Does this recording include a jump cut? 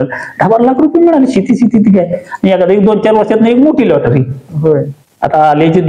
no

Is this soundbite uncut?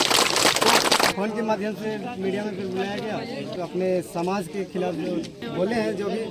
no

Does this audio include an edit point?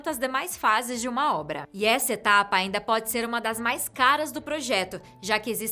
yes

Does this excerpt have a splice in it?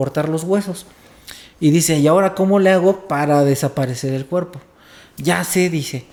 no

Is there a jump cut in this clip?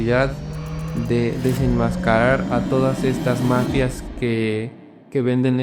no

